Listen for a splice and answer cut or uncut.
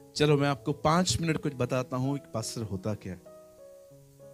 uncut